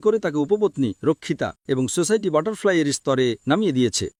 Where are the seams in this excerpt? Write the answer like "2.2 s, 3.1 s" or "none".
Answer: none